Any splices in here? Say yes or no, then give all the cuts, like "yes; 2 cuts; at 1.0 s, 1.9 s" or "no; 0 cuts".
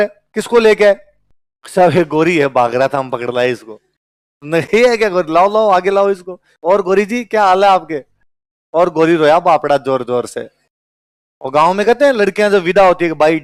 no; 0 cuts